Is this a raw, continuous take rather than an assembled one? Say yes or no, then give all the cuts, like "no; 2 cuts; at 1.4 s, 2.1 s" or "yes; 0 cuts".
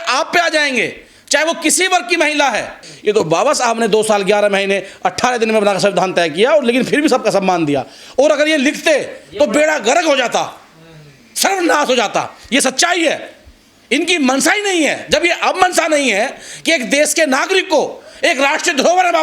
no; 1 cut; at 2.8 s